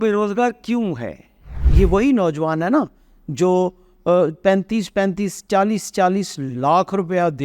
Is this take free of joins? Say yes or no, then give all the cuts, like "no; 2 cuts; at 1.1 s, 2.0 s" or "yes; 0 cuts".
no; 1 cut; at 1.6 s